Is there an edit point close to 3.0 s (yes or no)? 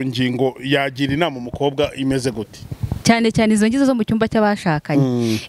yes